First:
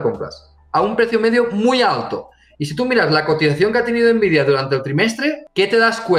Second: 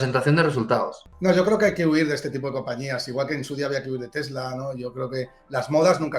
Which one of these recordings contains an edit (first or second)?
second